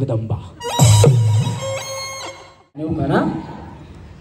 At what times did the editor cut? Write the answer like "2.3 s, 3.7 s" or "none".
2.8 s